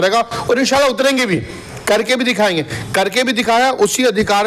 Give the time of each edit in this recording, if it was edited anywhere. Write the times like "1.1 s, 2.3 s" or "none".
none